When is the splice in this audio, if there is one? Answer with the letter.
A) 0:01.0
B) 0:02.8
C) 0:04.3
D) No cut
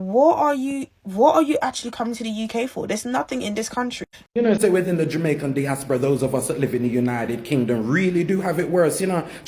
C